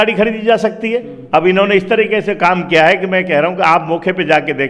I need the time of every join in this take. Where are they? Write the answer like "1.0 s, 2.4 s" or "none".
1.1 s